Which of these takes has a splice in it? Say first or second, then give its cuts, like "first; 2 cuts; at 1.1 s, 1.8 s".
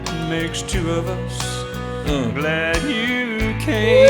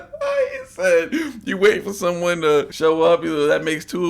second; 1 cut; at 2.7 s